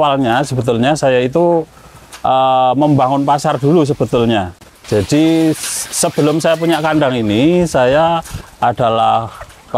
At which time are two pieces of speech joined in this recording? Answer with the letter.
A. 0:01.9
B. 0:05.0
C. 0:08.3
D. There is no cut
D